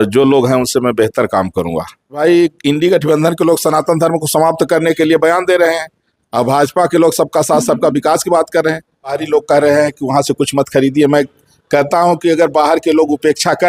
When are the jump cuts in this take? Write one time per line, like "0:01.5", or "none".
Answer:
0:02.2
0:09.2